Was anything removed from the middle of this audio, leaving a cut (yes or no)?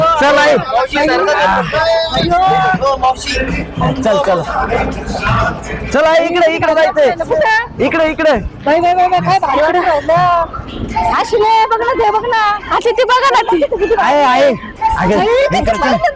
no